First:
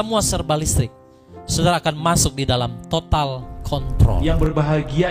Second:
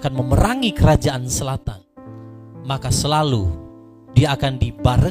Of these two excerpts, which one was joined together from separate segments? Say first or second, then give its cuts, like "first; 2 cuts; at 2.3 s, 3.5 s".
first; 1 cut; at 4.2 s